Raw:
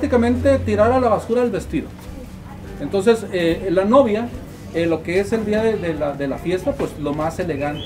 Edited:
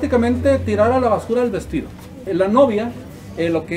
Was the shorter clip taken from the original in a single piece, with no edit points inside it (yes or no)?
no